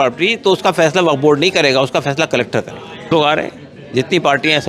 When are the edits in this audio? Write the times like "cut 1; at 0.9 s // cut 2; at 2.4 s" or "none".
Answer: cut 1; at 3.1 s